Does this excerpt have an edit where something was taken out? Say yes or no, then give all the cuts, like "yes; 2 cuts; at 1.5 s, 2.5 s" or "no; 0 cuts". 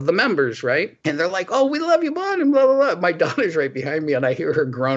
yes; 1 cut; at 1.0 s